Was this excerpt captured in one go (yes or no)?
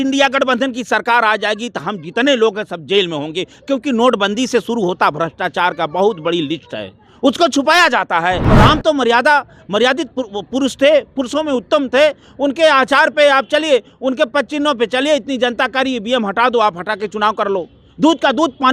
no